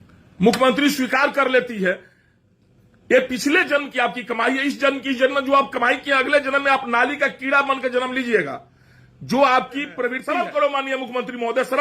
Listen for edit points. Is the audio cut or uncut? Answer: cut